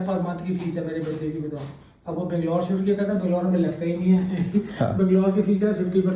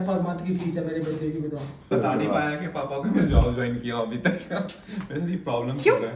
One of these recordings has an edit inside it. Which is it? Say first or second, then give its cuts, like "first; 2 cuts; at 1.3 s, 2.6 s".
second; 1 cut; at 1.9 s